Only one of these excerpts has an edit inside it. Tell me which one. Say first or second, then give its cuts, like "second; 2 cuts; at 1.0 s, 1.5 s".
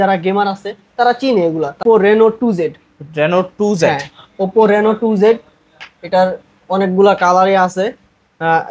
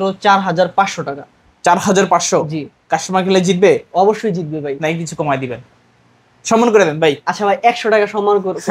first; 1 cut; at 1.8 s